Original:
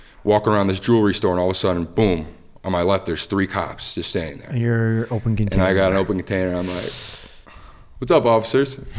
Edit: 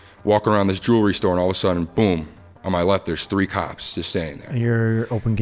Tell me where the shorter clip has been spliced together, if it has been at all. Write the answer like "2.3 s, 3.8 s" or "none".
none

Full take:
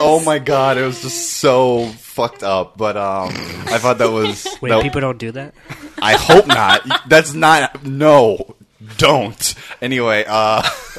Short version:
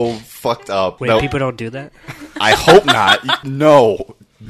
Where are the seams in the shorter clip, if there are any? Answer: 1.0 s, 3.3 s

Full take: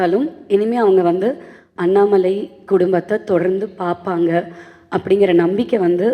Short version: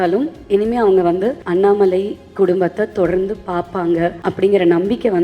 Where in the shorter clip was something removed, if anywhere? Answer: 1.4 s, 4.2 s

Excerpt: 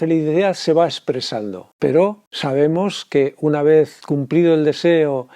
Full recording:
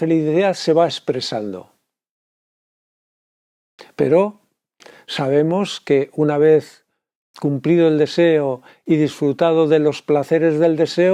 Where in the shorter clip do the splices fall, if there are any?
1.6 s, 2.3 s, 4.0 s

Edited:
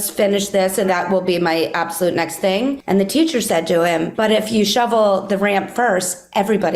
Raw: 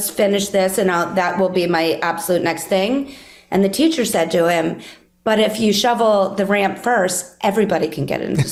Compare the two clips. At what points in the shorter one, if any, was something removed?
0.9 s, 2.8 s, 4.1 s

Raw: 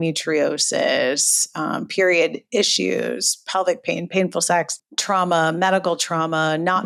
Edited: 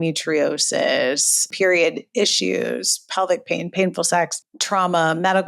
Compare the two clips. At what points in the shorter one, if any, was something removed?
1.5 s

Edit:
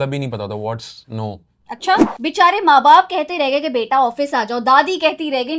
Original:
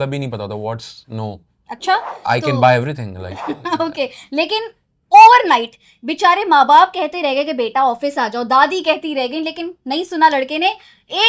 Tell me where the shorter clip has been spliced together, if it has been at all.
2.1 s

